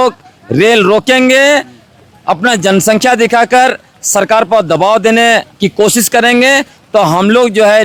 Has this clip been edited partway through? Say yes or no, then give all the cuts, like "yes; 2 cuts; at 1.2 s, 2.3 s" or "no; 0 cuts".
no; 0 cuts